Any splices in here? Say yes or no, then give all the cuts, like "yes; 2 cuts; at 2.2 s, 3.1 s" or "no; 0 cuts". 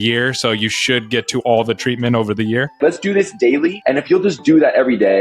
yes; 2 cuts; at 2.8 s, 3.8 s